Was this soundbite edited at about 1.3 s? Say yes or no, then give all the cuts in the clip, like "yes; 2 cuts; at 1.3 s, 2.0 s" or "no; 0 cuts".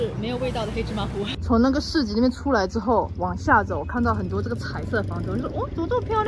yes; 1 cut; at 1.3 s